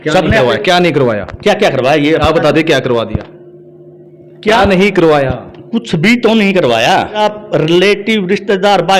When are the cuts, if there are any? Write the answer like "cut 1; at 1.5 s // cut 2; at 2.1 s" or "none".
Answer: cut 1; at 7.2 s

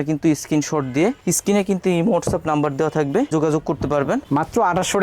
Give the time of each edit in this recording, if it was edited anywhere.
cut 1; at 3.3 s // cut 2; at 4.2 s

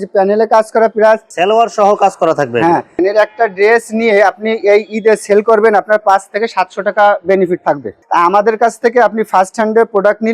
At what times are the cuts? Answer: cut 1; at 1.3 s // cut 2; at 3.0 s // cut 3; at 8.0 s

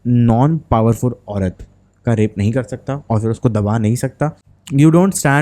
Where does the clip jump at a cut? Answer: cut 1; at 4.5 s

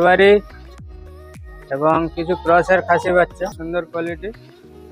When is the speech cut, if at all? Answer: cut 1; at 3.6 s

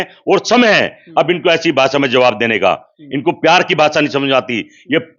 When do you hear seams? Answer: none

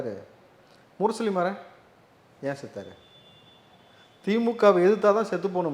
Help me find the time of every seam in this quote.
none

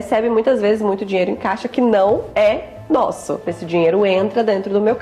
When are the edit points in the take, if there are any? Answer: cut 1; at 3.6 s

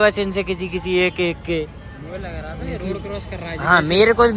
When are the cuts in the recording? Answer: none

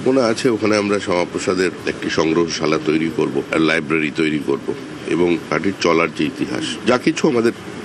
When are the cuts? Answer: cut 1; at 1.9 s

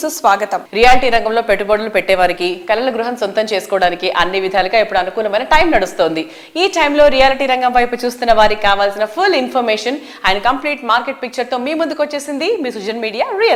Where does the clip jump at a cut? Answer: none

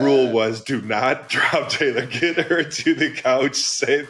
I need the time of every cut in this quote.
none

